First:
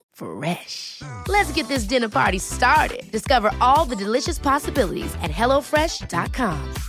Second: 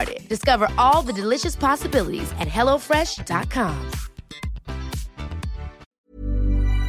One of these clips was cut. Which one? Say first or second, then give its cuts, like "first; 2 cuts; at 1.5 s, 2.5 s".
second; 1 cut; at 5.8 s